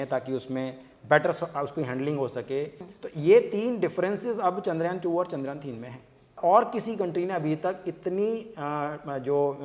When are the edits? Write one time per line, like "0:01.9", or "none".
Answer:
0:02.9
0:06.3